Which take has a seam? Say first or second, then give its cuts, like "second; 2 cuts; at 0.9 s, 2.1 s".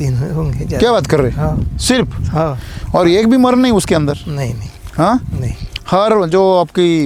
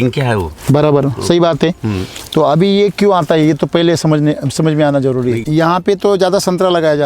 second; 1 cut; at 5.4 s